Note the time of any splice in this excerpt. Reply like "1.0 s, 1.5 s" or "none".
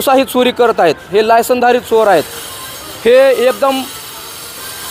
none